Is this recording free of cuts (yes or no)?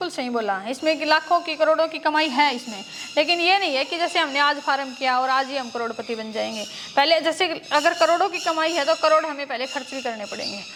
yes